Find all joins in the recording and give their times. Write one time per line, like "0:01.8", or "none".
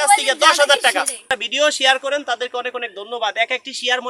0:01.3